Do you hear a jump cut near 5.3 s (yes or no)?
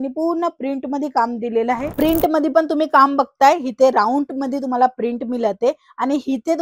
no